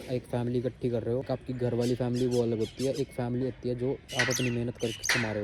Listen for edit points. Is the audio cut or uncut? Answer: cut